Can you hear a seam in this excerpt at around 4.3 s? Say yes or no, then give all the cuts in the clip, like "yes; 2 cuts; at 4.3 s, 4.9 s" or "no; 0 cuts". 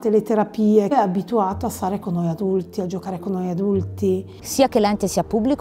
yes; 2 cuts; at 0.9 s, 4.3 s